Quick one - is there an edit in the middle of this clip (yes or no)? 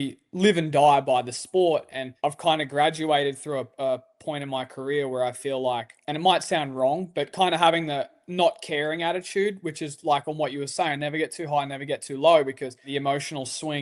yes